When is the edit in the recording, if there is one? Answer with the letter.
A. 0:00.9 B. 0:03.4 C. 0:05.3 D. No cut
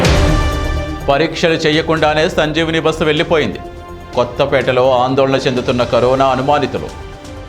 A